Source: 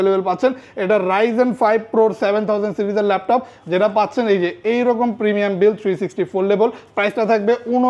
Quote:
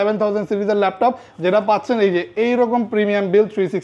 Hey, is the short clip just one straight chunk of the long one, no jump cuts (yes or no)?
yes